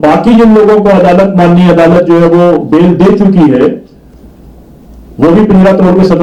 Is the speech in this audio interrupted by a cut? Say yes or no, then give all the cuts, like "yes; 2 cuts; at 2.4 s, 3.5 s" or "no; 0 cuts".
no; 0 cuts